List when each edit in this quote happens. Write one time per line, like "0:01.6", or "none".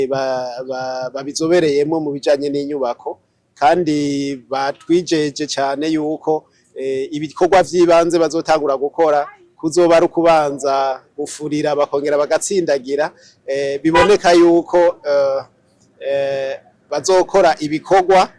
none